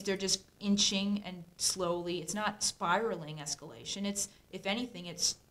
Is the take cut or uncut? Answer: uncut